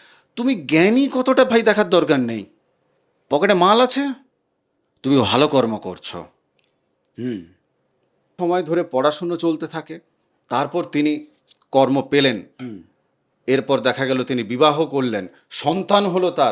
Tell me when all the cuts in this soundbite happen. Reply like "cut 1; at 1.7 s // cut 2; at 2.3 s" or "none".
cut 1; at 8.4 s